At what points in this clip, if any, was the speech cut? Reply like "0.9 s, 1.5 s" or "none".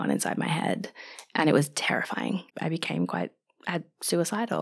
2.4 s